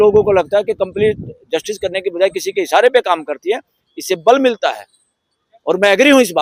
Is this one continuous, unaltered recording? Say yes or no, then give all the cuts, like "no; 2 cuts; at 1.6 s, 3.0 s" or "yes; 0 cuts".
yes; 0 cuts